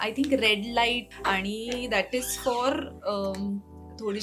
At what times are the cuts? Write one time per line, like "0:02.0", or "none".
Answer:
0:01.1